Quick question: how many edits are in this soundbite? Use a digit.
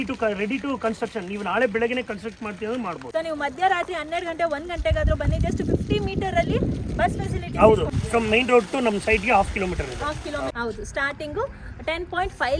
3